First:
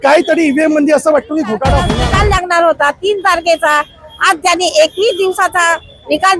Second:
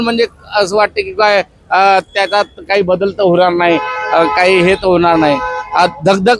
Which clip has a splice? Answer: first; 1 cut; at 1.9 s

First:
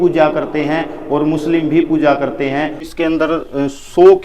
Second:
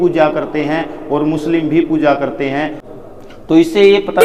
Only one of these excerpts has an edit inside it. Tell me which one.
first; 1 cut; at 2.9 s

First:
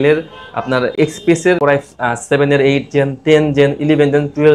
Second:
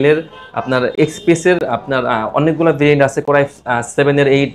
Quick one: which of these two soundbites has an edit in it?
first; 1 cut; at 1.6 s

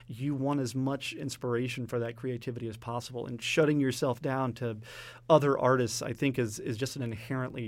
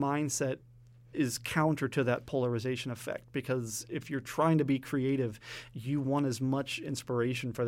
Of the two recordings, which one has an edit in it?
second; 1 cut; at 1.0 s

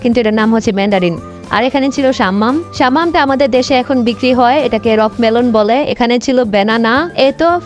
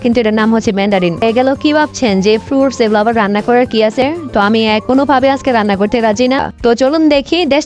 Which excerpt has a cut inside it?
second; 3 cuts; at 1.2 s, 4.0 s, 6.4 s

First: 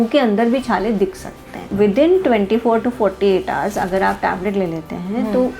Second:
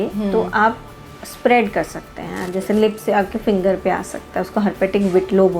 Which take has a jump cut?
first; 1 cut; at 1.7 s

